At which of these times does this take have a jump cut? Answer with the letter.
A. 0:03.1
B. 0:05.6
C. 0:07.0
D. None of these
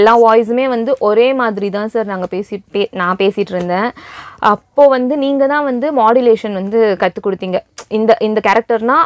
D